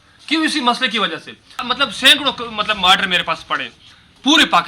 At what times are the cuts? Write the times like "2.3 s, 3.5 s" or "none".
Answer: 1.6 s